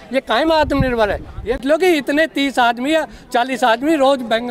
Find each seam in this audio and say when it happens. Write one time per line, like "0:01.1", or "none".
0:01.6